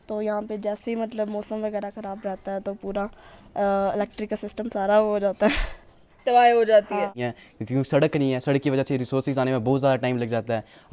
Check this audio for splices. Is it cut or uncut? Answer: cut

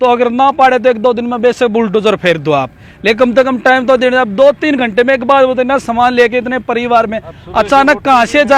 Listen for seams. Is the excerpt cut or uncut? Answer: uncut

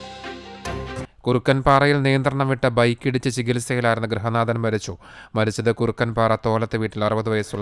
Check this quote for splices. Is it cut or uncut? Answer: cut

